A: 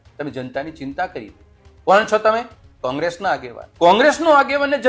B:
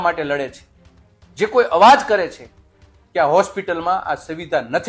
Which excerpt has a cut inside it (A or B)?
A